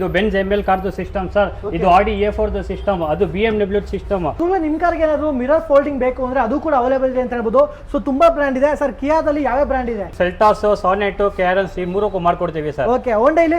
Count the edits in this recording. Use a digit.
2